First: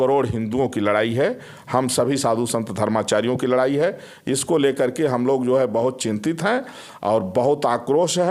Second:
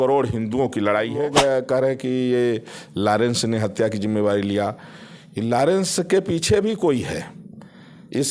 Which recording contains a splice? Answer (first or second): second